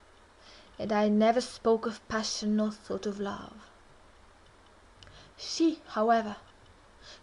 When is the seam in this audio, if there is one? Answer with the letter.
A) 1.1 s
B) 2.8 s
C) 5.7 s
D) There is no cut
A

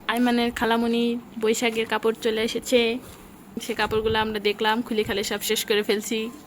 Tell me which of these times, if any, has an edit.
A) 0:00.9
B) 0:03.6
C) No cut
B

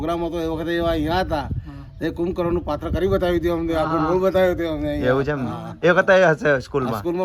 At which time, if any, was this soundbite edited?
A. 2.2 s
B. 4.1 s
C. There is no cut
C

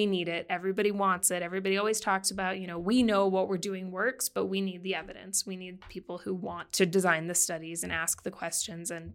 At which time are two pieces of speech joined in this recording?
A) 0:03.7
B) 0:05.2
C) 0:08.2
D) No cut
D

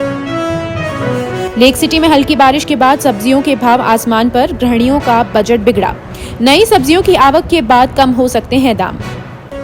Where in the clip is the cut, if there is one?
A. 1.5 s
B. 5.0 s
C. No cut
A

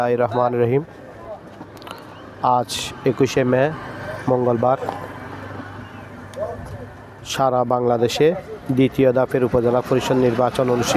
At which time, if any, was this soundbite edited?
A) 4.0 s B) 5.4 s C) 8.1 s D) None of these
D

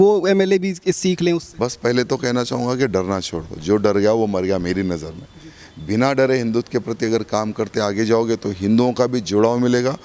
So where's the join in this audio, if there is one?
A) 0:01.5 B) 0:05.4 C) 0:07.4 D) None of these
A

